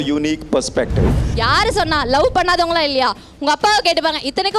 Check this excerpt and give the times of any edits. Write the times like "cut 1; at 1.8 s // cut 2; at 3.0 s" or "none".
cut 1; at 1.2 s